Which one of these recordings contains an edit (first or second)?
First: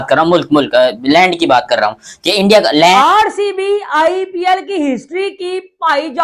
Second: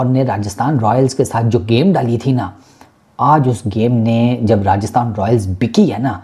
first